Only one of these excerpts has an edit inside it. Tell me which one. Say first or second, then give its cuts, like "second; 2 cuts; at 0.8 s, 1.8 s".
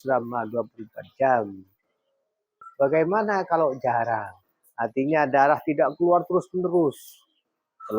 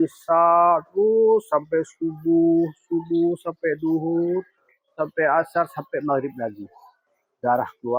first; 1 cut; at 2.6 s